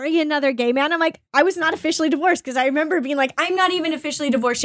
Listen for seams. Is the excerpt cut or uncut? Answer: cut